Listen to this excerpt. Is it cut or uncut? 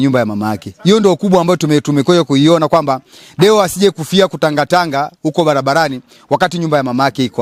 uncut